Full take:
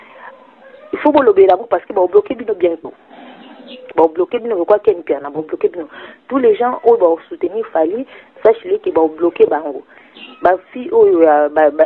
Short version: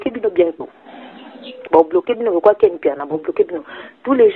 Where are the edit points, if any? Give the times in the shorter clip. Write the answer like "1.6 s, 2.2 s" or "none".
none